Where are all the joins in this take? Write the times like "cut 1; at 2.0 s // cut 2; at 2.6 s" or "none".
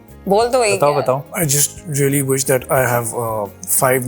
cut 1; at 1.3 s